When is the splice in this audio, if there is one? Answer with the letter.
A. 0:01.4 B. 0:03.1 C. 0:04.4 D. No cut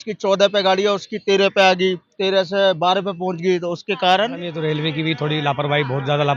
C